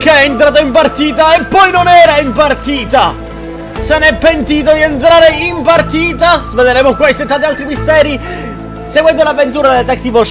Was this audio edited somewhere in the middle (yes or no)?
no